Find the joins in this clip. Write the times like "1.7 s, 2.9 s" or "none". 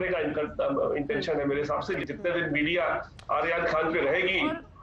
2.0 s